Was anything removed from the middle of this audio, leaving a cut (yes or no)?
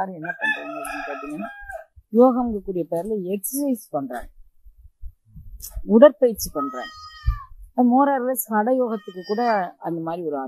no